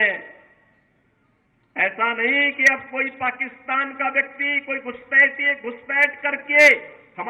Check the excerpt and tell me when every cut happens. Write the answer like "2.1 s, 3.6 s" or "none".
none